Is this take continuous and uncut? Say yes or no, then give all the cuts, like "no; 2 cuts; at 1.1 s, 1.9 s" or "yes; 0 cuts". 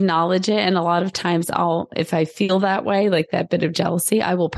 yes; 0 cuts